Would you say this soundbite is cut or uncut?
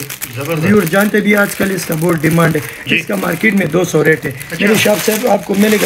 uncut